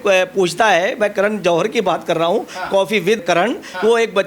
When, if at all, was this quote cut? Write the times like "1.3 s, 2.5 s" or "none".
3.2 s

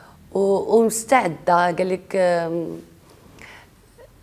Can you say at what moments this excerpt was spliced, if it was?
none

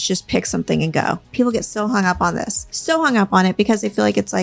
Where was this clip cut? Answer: 1.3 s, 2.7 s

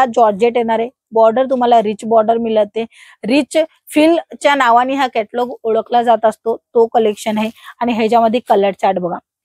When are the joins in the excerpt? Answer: none

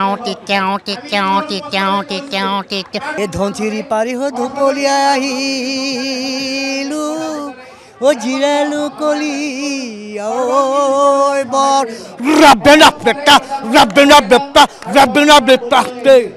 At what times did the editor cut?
3.1 s

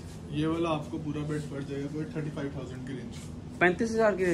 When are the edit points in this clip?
none

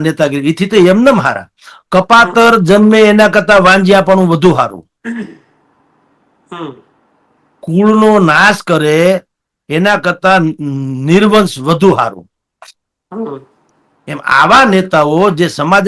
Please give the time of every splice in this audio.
none

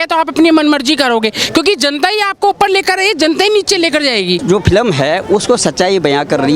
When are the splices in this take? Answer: none

